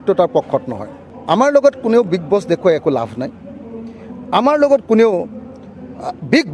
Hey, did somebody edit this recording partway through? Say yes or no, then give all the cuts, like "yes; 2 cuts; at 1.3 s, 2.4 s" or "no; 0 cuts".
yes; 1 cut; at 1.1 s